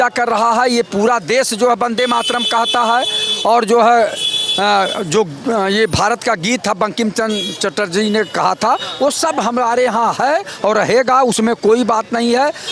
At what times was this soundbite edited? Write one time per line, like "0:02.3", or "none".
none